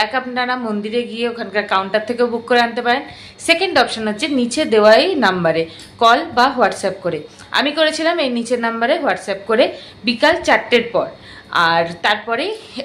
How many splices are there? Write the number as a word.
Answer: zero